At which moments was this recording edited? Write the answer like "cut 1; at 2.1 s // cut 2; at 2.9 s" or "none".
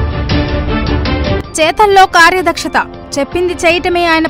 cut 1; at 0.9 s